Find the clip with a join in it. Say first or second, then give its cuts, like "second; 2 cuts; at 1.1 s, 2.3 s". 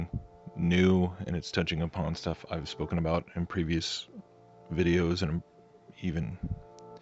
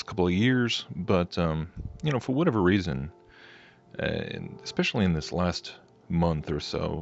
first; 1 cut; at 3.4 s